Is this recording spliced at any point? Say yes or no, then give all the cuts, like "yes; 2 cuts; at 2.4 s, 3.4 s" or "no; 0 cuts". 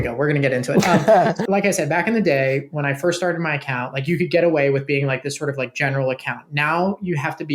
yes; 1 cut; at 1.4 s